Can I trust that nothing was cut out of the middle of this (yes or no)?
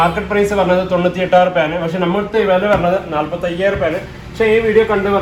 yes